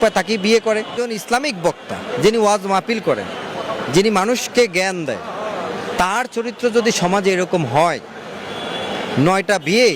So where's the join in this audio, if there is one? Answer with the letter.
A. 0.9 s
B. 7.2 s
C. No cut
A